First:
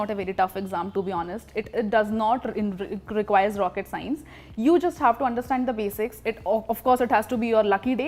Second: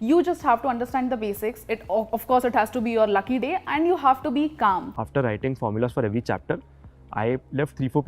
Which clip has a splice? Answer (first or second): second